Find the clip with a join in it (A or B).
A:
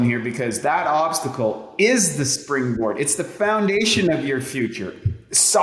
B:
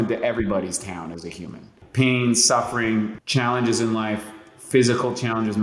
B